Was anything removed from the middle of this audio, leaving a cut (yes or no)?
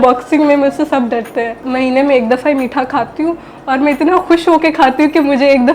yes